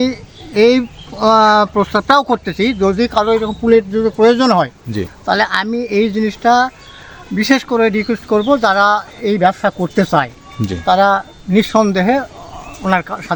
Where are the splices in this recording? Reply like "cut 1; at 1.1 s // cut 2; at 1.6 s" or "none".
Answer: none